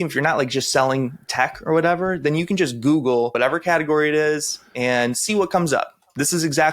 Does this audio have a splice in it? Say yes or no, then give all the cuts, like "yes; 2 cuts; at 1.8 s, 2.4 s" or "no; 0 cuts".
yes; 1 cut; at 3.3 s